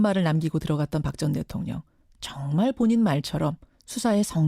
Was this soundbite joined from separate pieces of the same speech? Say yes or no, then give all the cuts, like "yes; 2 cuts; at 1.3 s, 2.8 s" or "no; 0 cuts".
yes; 1 cut; at 2.5 s